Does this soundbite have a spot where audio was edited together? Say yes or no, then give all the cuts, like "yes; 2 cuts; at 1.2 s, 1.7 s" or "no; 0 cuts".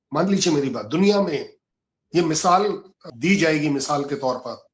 yes; 1 cut; at 3.0 s